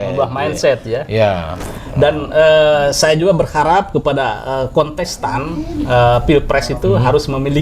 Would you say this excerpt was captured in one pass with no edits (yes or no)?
yes